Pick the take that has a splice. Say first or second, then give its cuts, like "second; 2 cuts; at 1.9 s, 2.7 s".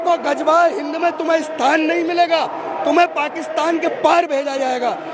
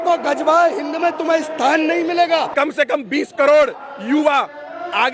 second; 1 cut; at 2.5 s